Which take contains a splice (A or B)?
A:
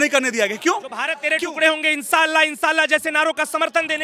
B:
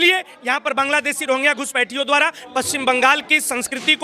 A